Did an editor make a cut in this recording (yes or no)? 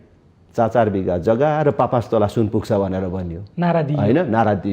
no